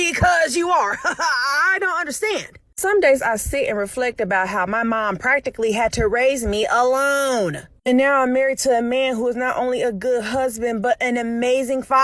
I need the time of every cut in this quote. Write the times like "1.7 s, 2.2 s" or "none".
none